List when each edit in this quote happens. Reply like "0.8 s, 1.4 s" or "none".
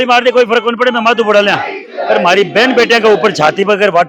none